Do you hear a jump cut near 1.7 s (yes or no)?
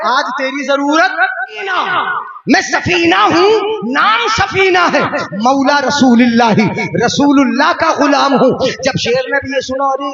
yes